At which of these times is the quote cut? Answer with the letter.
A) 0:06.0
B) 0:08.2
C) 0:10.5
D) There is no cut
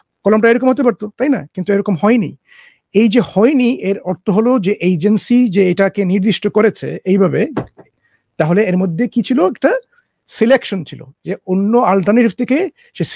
D